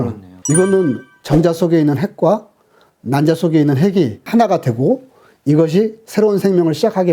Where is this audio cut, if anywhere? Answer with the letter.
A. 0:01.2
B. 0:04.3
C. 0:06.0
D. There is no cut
A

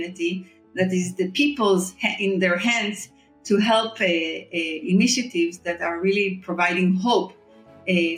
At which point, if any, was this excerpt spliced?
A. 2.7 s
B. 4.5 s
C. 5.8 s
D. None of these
D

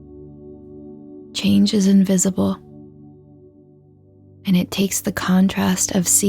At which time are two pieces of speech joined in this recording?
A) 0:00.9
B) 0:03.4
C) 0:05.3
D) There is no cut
A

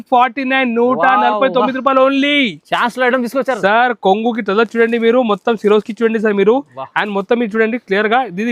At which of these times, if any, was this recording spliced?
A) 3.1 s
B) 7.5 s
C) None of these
C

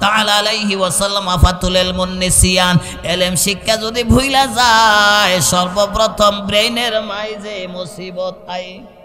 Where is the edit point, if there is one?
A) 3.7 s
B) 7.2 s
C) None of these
C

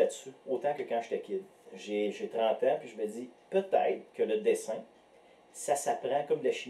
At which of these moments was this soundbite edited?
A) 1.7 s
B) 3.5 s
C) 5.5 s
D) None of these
A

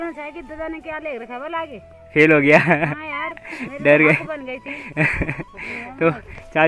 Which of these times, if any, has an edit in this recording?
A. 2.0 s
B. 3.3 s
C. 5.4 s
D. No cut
D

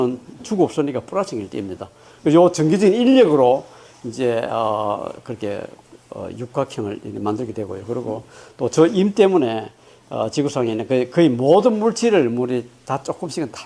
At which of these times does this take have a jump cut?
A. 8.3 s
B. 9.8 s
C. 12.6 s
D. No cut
B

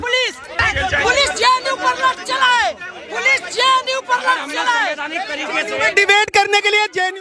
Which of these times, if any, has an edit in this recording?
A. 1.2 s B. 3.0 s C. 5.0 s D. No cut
D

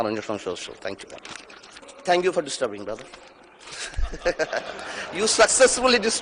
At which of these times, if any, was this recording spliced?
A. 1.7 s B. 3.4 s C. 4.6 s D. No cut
A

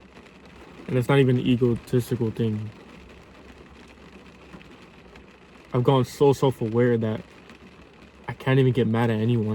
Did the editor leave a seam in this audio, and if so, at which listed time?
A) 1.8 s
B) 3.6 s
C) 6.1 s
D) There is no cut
D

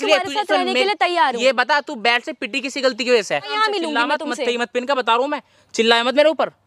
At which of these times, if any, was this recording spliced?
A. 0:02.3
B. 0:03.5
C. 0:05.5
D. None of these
B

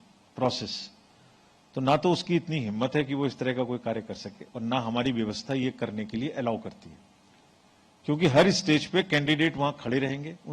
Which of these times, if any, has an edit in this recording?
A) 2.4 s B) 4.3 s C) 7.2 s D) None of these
D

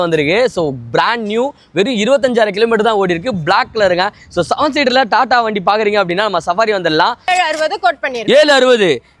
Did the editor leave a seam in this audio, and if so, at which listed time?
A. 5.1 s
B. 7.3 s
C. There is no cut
B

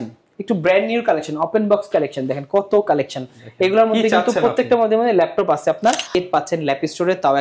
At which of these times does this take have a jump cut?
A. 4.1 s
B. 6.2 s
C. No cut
B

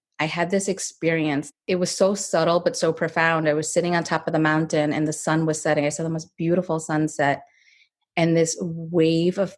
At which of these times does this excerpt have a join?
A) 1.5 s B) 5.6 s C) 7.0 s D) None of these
A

